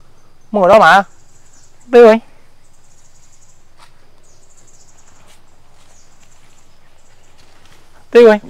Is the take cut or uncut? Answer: uncut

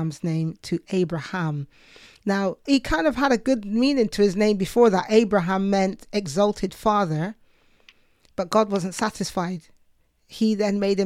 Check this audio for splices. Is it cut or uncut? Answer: cut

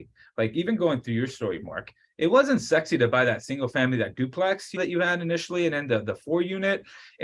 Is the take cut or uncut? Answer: cut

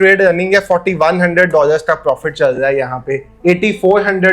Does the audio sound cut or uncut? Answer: uncut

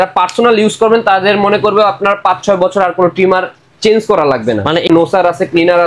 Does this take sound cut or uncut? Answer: cut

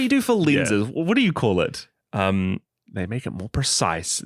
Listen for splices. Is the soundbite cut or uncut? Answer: cut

